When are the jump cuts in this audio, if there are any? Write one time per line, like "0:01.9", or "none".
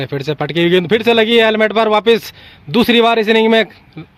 none